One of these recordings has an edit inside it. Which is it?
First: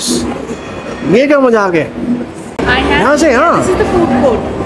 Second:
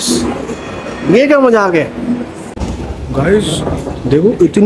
second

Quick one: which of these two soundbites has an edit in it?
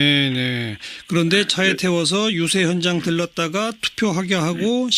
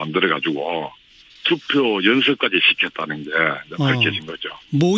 second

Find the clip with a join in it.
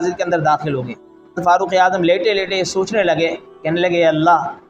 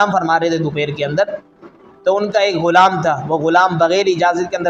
first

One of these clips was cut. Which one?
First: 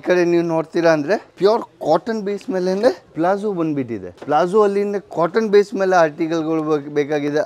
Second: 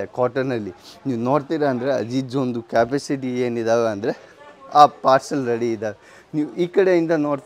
first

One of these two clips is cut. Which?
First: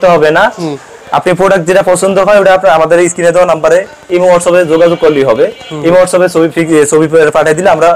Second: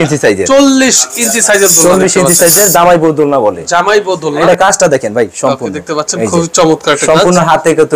second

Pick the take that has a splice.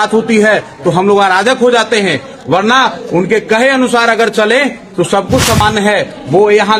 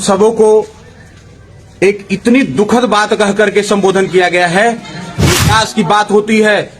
second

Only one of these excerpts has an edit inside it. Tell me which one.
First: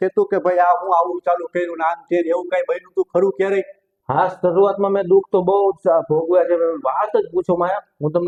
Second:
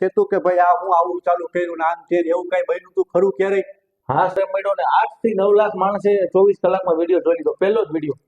second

